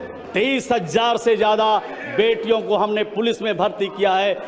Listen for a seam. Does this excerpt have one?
no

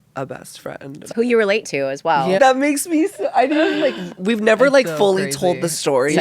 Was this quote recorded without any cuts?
no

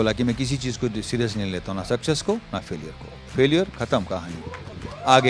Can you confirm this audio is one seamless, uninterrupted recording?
yes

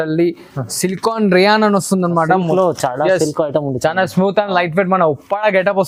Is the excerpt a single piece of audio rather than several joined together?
yes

